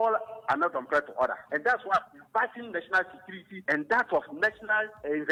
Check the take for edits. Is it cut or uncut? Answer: uncut